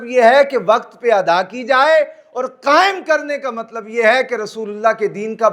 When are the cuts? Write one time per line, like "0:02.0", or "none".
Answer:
none